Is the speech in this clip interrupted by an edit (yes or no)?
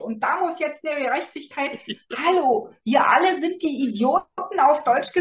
no